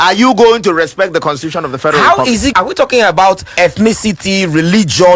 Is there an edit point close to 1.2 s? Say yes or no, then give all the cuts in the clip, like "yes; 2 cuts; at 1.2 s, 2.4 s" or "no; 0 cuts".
no; 2 cuts; at 2.5 s, 3.5 s